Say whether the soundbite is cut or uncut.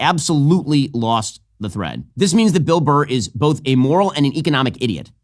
cut